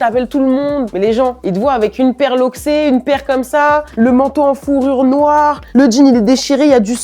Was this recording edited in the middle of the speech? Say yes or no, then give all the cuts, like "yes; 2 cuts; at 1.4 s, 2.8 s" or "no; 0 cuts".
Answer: yes; 2 cuts; at 0.9 s, 3.9 s